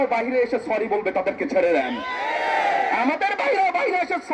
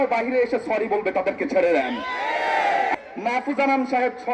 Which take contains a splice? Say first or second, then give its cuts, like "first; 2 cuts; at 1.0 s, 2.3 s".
second; 1 cut; at 2.9 s